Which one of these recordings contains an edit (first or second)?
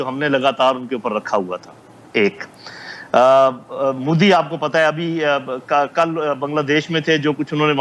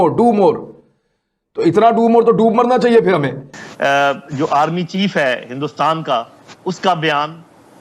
second